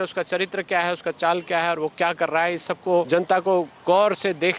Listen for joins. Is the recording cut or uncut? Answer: cut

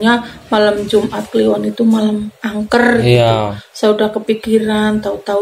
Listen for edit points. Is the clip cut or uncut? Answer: uncut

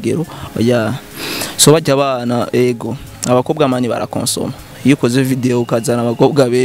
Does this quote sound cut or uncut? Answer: uncut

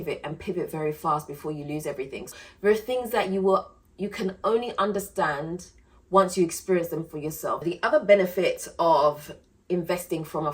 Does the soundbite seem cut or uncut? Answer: cut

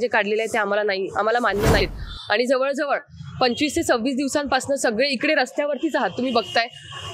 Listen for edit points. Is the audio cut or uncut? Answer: cut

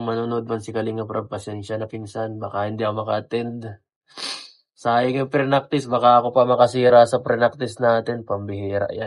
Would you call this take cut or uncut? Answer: uncut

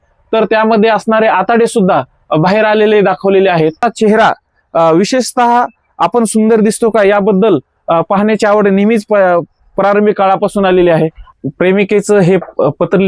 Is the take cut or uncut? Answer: cut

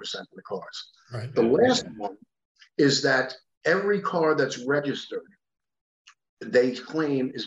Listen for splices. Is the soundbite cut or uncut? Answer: uncut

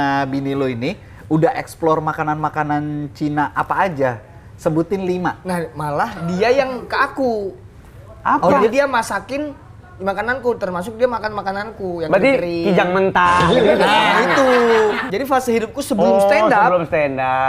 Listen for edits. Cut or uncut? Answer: cut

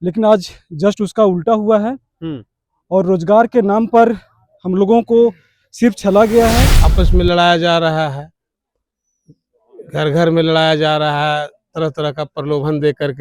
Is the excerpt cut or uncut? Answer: cut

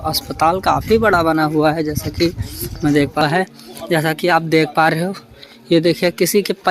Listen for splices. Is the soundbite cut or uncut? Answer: cut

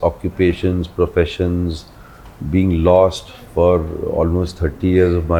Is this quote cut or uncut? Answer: uncut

